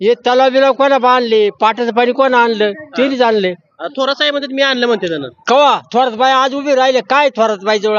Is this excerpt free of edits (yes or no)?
yes